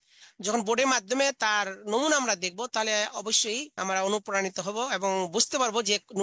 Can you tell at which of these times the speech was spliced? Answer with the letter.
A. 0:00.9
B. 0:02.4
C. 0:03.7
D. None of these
C